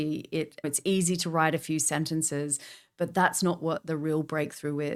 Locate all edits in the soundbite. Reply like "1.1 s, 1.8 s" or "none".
none